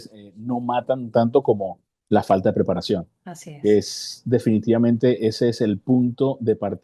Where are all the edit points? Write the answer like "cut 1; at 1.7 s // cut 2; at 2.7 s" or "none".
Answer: none